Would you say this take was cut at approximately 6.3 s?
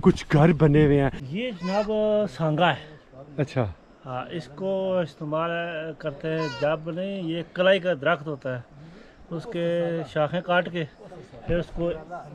no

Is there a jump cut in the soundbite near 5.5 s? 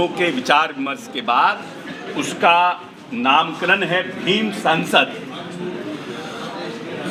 no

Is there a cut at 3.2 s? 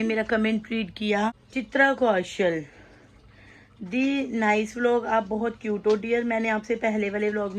no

